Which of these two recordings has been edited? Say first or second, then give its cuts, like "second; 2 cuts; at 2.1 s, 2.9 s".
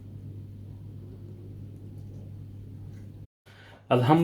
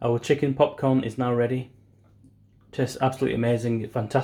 first; 1 cut; at 3.3 s